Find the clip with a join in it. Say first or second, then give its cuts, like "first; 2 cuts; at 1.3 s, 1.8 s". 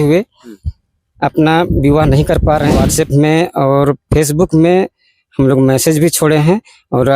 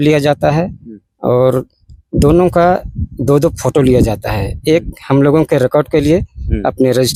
first; 1 cut; at 2.7 s